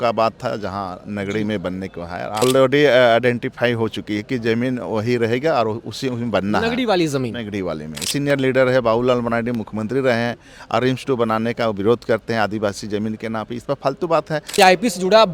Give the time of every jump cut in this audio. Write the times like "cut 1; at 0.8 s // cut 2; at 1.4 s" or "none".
cut 1; at 2.4 s // cut 2; at 8.1 s // cut 3; at 14.5 s